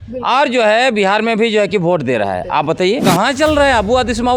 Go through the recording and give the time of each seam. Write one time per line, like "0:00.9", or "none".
0:03.0